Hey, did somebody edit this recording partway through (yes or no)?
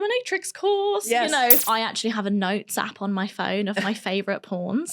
yes